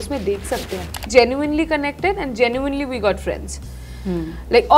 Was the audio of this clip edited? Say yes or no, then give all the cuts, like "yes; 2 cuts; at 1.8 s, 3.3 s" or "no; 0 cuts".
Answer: yes; 1 cut; at 1.1 s